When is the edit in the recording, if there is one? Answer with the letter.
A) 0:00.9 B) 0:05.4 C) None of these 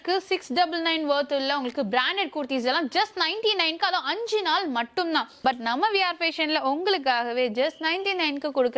B